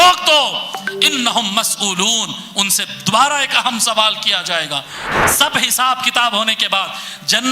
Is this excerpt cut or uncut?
cut